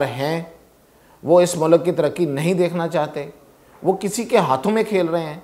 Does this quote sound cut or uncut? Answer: uncut